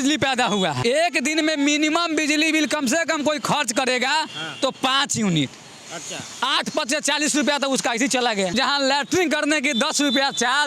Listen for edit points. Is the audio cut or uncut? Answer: cut